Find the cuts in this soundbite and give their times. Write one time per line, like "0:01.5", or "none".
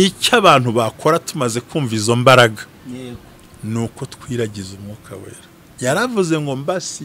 none